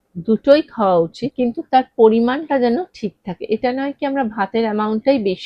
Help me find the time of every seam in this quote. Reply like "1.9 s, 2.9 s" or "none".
1.2 s